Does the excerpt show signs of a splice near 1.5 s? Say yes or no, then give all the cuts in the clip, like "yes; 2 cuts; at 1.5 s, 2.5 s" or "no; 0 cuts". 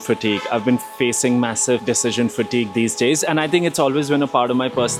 no; 0 cuts